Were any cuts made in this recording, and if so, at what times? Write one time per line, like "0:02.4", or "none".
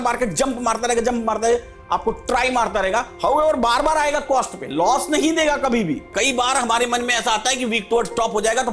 0:06.1